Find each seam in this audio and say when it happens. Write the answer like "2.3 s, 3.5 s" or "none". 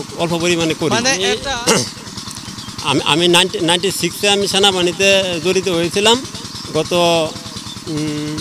1.4 s